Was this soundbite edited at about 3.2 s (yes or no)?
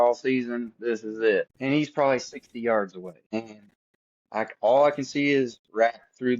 yes